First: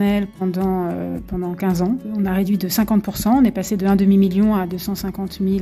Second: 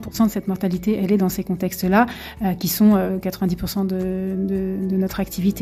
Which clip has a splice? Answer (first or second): first